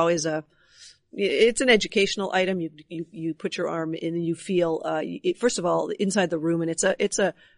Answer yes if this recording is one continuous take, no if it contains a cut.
yes